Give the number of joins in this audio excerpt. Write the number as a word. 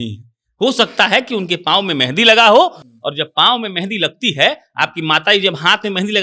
zero